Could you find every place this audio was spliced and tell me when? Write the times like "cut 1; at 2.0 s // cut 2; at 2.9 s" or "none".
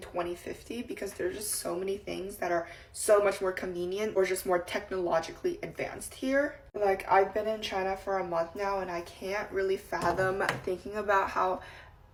none